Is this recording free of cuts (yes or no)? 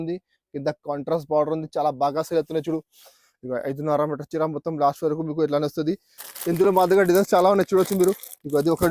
no